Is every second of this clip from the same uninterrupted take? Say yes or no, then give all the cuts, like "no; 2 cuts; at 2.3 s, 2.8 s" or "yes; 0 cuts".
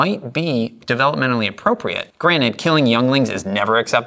no; 1 cut; at 2.1 s